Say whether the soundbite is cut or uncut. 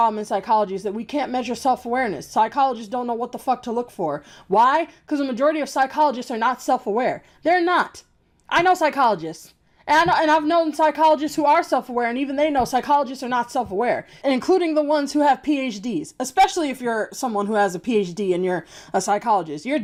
uncut